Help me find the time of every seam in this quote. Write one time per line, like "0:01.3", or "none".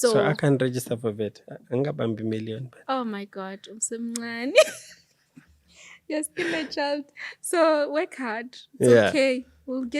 none